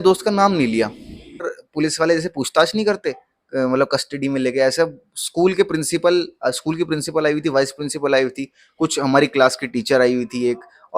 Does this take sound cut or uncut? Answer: cut